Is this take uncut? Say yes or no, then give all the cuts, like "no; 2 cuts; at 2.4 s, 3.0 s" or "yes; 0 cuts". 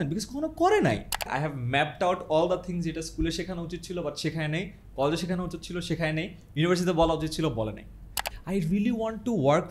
no; 2 cuts; at 1.3 s, 8.3 s